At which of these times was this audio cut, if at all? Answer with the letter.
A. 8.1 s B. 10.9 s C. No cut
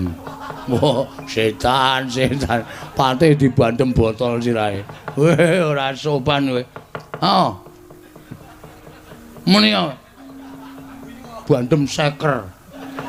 C